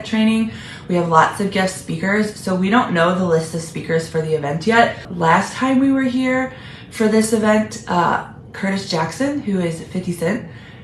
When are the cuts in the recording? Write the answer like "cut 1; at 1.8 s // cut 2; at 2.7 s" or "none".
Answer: cut 1; at 5.1 s